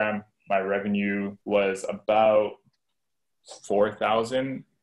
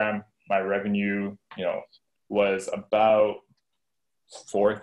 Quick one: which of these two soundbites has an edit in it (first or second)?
first